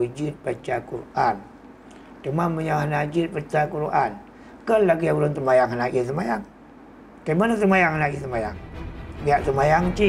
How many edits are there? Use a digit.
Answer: 0